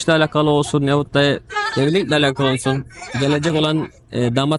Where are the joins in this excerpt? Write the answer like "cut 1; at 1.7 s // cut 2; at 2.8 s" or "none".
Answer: none